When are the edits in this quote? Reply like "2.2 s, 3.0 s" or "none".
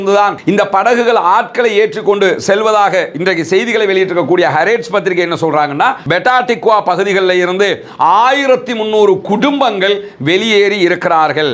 6.1 s